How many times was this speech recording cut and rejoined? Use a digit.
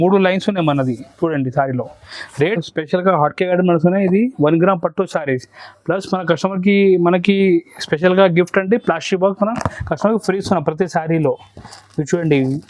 1